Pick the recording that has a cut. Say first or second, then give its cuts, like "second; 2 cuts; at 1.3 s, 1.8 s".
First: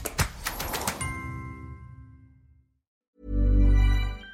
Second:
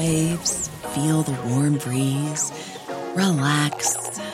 first; 1 cut; at 3.1 s